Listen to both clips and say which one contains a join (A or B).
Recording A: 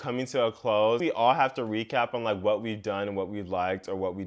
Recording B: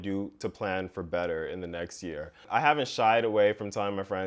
B